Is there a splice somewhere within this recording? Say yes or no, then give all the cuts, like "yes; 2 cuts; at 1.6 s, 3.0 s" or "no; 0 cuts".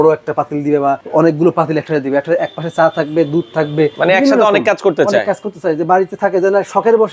yes; 2 cuts; at 1.0 s, 3.9 s